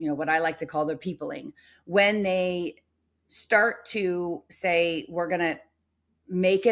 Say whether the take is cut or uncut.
uncut